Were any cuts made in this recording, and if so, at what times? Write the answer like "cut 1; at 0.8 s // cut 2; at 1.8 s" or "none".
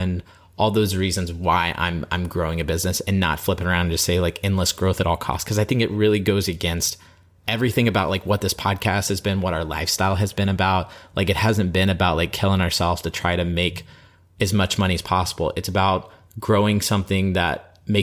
none